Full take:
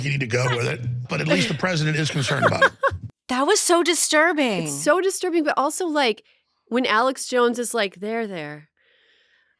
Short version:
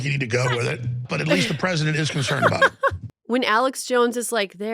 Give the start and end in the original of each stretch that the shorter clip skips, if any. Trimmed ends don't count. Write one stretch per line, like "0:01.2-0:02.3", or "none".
0:03.1-0:06.5

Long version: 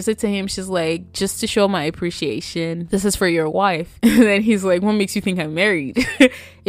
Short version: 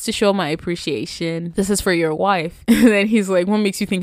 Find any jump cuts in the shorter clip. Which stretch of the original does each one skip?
none

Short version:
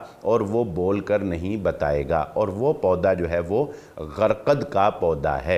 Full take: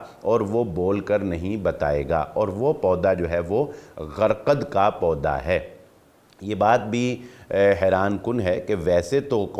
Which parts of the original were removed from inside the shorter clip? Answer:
none

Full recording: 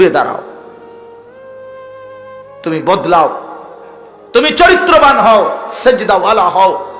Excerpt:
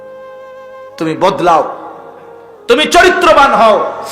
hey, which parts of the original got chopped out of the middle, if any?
0:02.5-0:02.6

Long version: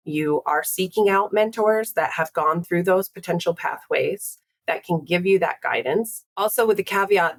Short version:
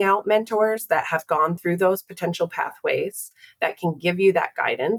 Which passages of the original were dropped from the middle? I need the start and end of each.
none

